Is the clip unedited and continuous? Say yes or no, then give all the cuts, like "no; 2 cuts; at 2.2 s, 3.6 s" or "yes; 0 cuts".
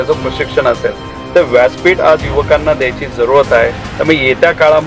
yes; 0 cuts